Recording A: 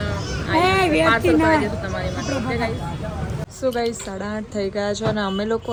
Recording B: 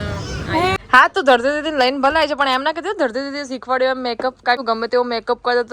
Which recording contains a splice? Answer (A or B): B